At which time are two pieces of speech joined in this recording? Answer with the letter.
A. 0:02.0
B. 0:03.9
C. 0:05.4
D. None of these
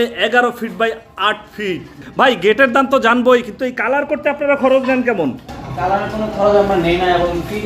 A